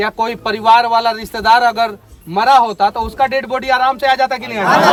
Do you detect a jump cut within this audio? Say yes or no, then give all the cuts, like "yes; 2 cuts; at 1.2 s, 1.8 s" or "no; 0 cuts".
no; 0 cuts